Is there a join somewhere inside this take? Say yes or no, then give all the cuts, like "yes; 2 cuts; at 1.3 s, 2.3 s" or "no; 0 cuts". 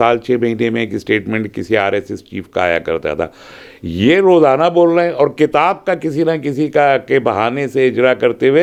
no; 0 cuts